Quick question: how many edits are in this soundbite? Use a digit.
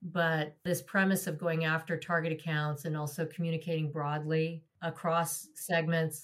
0